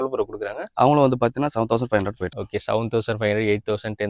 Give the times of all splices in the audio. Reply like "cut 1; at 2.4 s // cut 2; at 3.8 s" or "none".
none